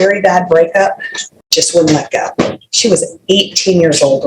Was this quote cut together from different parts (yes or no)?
no